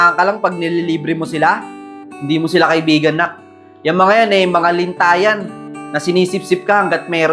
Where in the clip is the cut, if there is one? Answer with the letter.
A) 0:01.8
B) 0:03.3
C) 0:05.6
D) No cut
D